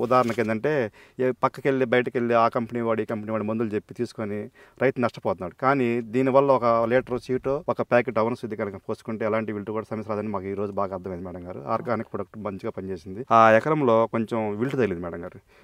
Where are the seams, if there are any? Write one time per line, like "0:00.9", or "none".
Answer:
0:13.2

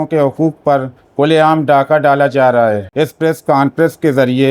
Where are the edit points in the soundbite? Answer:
0:02.9

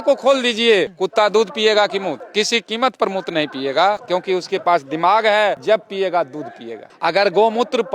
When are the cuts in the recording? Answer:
none

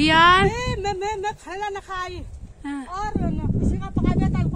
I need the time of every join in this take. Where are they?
none

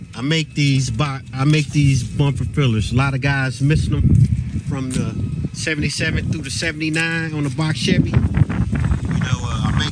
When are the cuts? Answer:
none

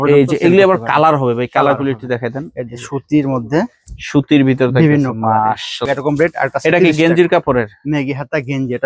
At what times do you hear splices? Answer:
0:05.7

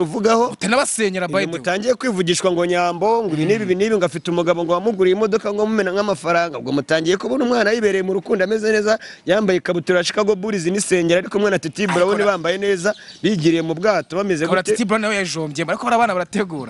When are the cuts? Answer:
none

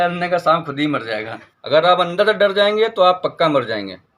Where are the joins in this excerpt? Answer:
0:01.4

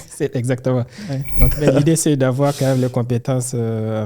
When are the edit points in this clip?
0:01.5

